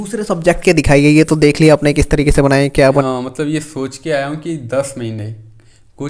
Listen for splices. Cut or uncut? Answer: cut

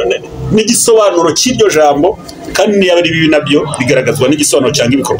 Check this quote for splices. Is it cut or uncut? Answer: uncut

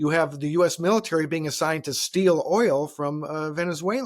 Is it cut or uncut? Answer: uncut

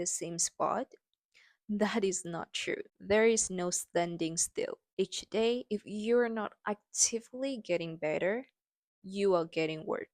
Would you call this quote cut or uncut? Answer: cut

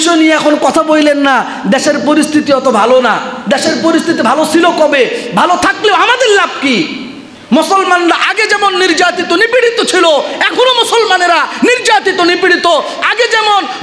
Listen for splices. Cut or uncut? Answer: uncut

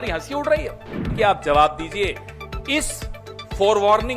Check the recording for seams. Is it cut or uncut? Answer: cut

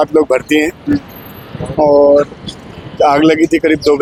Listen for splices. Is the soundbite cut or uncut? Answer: uncut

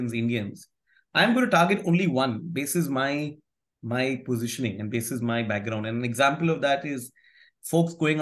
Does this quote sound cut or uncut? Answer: uncut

